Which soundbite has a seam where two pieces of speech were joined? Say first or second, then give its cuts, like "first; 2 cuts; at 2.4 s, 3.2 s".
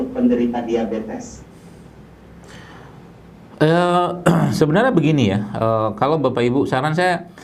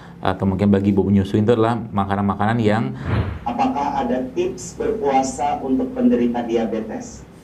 second; 1 cut; at 3.2 s